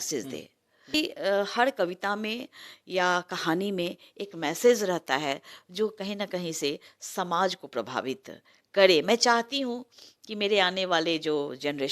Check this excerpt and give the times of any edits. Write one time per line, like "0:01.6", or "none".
0:00.9